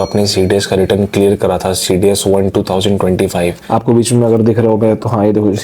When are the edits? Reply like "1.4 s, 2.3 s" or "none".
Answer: 3.6 s